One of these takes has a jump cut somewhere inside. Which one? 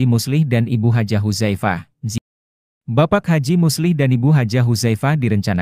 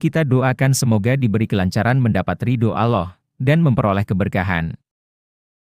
first; 1 cut; at 2.2 s

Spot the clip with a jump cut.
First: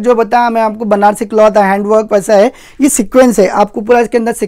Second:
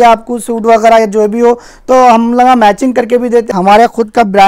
second; 1 cut; at 3.5 s

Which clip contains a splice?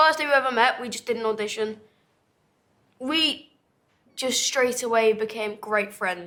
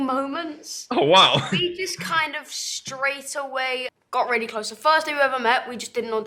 second; 1 cut; at 4.0 s

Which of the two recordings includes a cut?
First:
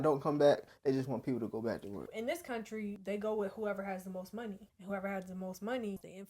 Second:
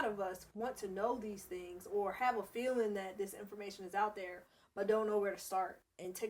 first; 3 cuts; at 2.1 s, 3.0 s, 4.7 s

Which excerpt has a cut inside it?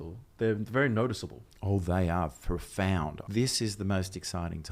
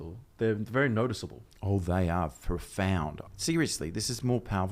second; 1 cut; at 3.2 s

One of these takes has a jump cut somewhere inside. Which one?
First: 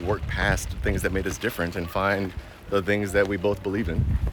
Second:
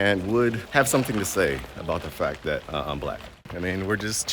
second; 1 cut; at 3.3 s

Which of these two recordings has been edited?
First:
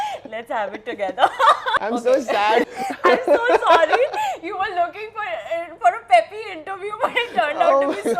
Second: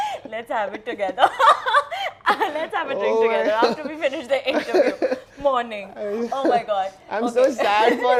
first; 2 cuts; at 1.7 s, 2.7 s

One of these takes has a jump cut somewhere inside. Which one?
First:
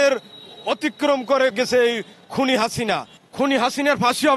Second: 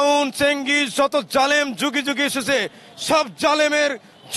first; 2 cuts; at 1.5 s, 3.1 s

